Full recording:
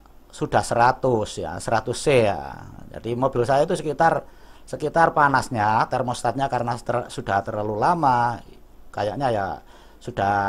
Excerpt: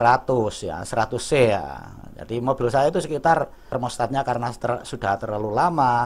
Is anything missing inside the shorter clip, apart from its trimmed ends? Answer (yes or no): yes